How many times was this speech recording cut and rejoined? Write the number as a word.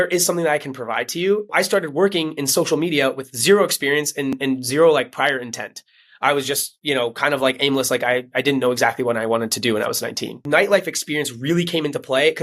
three